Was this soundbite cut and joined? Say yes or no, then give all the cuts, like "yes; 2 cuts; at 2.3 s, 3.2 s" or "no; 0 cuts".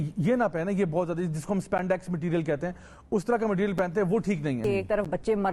yes; 1 cut; at 4.6 s